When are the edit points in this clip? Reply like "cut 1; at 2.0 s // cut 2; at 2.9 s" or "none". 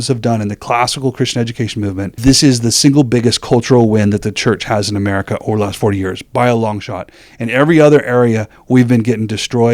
cut 1; at 2.1 s